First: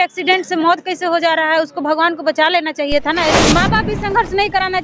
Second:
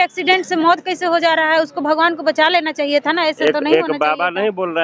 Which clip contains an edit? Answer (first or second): first